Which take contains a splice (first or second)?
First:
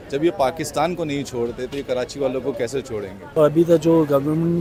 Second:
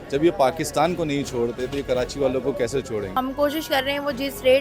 second